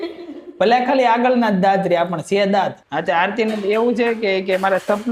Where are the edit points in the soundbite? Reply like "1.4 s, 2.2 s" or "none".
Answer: 2.9 s